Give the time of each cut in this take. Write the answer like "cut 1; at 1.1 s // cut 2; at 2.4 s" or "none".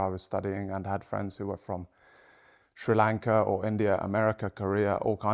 none